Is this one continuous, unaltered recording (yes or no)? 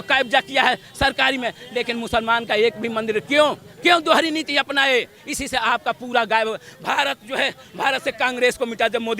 yes